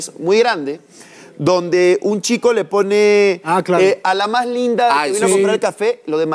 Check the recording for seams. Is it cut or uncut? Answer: uncut